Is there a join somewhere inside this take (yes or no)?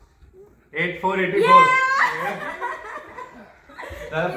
no